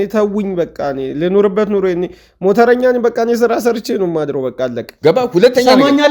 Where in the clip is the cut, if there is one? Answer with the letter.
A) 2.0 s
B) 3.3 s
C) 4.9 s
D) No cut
C